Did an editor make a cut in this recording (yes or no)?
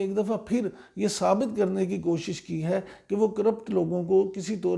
no